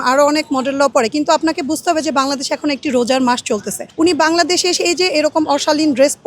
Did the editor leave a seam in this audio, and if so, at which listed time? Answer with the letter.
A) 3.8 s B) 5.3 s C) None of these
A